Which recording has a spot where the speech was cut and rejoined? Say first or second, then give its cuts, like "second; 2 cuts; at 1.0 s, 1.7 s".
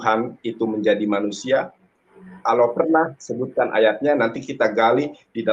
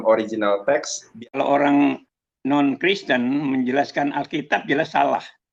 second; 1 cut; at 1.2 s